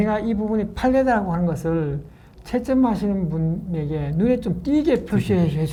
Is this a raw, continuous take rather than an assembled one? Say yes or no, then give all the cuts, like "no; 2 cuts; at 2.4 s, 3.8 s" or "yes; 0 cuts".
yes; 0 cuts